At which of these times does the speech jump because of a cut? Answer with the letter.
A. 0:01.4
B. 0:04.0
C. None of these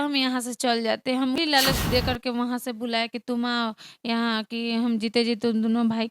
A